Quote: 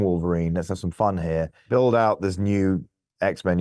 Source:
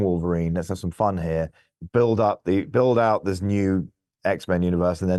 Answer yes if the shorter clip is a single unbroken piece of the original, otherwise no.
no